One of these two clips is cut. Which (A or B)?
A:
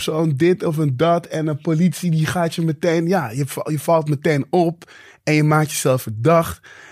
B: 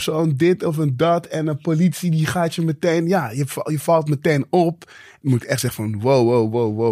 B